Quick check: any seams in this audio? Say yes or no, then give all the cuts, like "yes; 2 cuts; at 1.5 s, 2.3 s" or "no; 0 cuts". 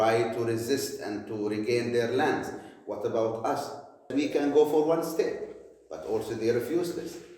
yes; 1 cut; at 4.1 s